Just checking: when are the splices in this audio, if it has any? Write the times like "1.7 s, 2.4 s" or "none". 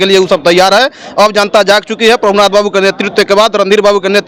none